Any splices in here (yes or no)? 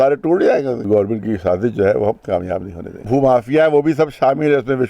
yes